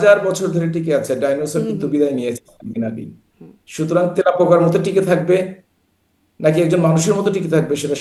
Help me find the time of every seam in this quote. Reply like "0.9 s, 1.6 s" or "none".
none